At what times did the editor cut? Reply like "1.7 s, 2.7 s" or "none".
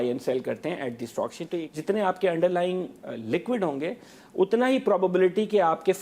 1.6 s